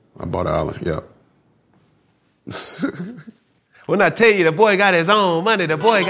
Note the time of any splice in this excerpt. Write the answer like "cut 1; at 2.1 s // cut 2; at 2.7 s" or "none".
cut 1; at 3.6 s